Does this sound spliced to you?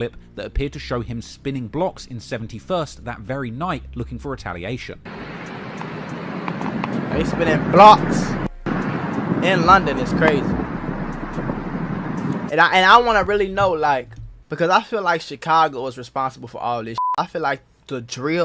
no; 0 cuts

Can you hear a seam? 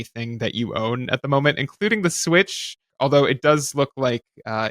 yes; 1 cut; at 2.8 s

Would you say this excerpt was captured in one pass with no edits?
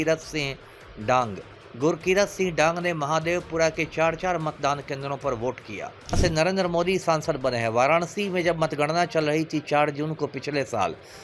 no; 1 cut; at 6.2 s

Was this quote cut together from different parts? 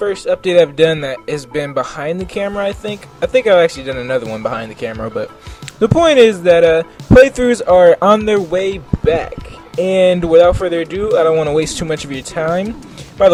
no; 0 cuts

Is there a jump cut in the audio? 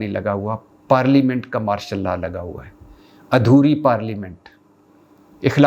no; 0 cuts

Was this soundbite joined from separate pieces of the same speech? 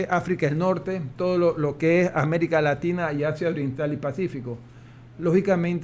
no; 0 cuts

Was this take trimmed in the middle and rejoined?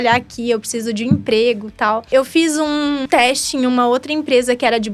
yes; 2 cuts; at 2.1 s, 3.1 s

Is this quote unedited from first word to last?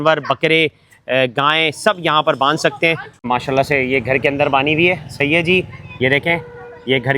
no; 1 cut; at 3.2 s

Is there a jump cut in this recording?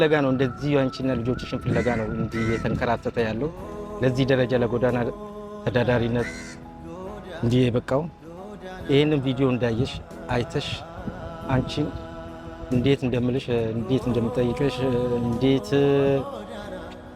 yes; 1 cut; at 16.2 s

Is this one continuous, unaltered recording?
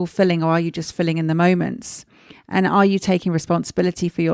yes; 0 cuts

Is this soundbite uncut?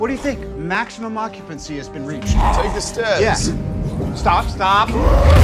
yes; 0 cuts

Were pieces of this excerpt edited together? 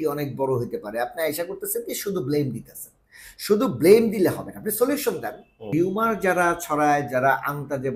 yes; 1 cut; at 5.7 s

